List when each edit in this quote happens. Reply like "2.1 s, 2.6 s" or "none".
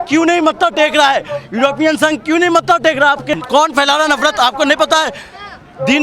3.4 s